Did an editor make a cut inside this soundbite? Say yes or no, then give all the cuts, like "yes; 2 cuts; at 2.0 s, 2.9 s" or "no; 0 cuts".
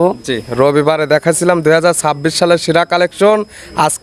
no; 0 cuts